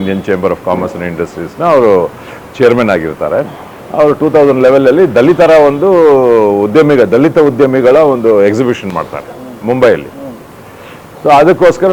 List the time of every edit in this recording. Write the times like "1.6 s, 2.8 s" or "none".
none

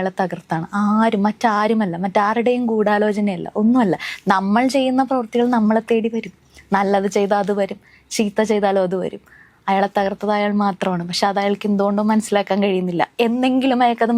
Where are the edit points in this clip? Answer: none

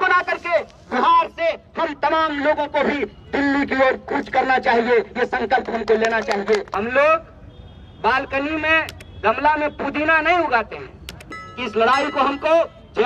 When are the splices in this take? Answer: 6.7 s, 11.5 s

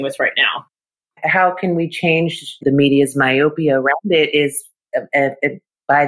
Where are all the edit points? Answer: 1.0 s, 2.6 s

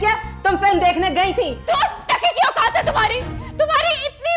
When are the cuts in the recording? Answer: 1.6 s

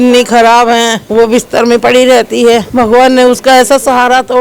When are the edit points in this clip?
1.0 s, 2.7 s

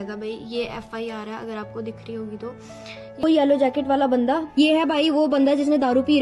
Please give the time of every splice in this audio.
3.2 s

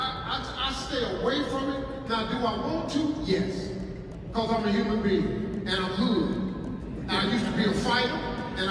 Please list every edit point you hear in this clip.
none

